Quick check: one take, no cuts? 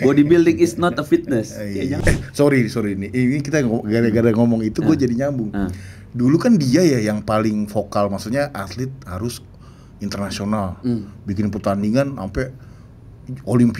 no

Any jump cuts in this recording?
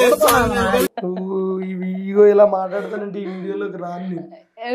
no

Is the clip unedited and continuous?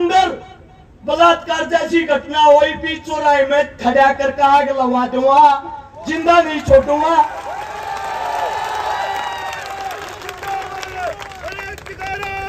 yes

